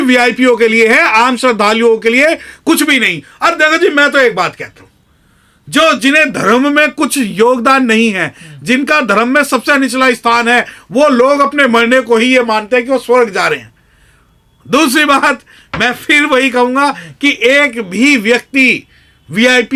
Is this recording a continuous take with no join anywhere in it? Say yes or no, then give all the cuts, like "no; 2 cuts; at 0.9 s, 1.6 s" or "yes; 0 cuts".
yes; 0 cuts